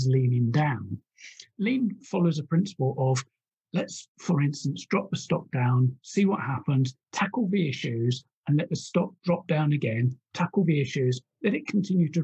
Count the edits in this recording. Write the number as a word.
two